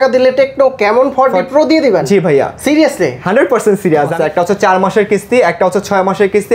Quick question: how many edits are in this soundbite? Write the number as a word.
one